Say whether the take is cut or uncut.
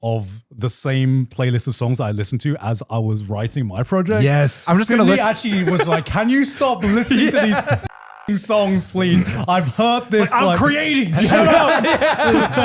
cut